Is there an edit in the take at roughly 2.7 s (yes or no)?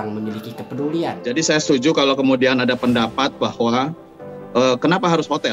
no